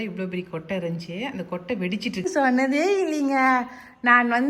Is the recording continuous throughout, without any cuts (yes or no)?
no